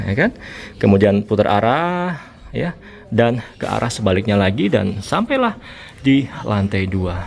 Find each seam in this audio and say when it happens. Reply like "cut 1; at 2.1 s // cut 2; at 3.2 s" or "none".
none